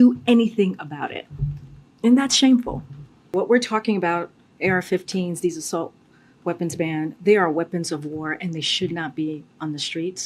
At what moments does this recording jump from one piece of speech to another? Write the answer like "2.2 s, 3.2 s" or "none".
3.3 s

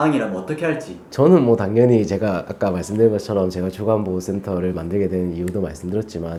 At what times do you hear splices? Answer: none

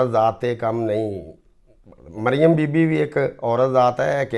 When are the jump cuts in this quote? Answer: none

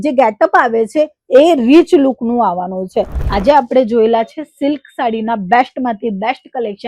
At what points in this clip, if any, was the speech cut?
3.1 s

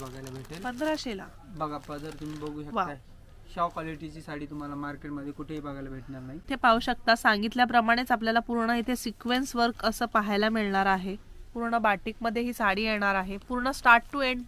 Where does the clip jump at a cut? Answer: 6.4 s

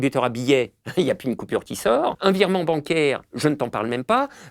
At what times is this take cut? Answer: 2.2 s

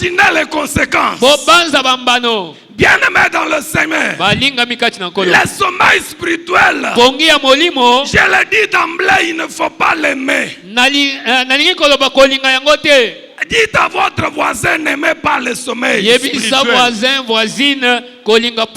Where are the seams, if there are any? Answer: none

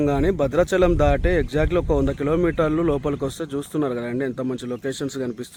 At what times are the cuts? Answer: none

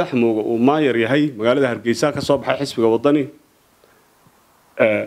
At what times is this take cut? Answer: none

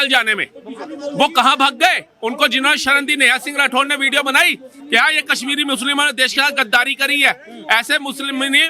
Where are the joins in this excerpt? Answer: none

